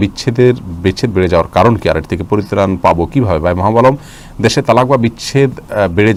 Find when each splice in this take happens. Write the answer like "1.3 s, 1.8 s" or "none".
none